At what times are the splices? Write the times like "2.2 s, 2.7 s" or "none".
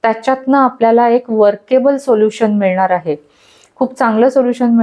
none